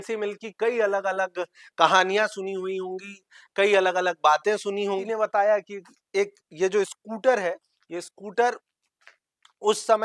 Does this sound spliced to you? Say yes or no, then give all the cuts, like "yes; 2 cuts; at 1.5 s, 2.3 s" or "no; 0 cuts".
yes; 1 cut; at 5.1 s